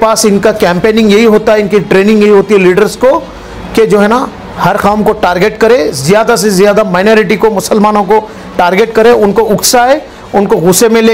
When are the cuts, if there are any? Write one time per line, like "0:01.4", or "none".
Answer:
none